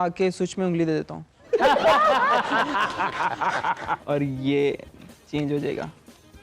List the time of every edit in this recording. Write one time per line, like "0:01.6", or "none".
0:04.0